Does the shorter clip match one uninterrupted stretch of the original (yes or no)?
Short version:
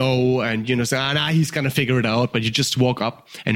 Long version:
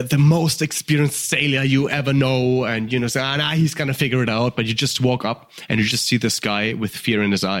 yes